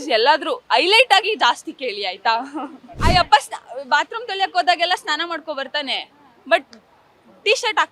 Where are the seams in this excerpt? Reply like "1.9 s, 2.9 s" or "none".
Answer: 3.0 s